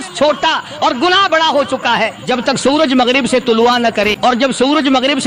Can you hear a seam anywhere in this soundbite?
yes; 2 cuts; at 2.2 s, 4.3 s

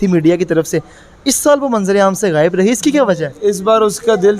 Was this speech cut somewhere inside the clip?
no; 0 cuts

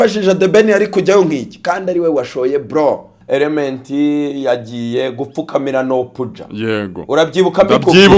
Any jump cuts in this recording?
yes; 1 cut; at 3.1 s

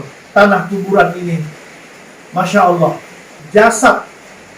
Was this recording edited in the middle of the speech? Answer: yes; 1 cut; at 3.3 s

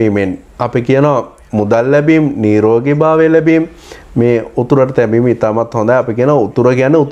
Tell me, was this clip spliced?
no; 0 cuts

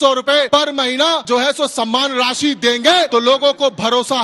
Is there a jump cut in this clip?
yes; 2 cuts; at 0.8 s, 3.1 s

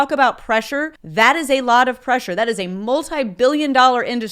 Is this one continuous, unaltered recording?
no; 1 cut; at 1.0 s

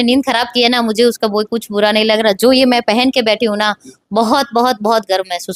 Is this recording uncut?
yes; 0 cuts

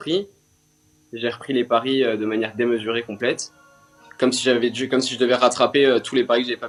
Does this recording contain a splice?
no; 0 cuts

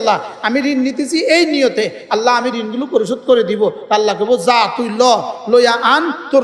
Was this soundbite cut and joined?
no; 0 cuts

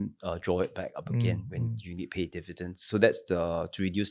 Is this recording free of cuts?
yes; 0 cuts

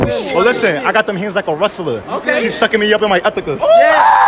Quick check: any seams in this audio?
no; 0 cuts

